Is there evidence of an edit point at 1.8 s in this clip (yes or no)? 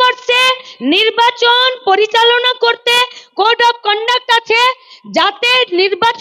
no